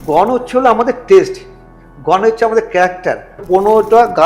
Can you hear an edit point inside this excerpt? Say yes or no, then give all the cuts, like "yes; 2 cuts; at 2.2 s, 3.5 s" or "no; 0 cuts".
yes; 1 cut; at 3.3 s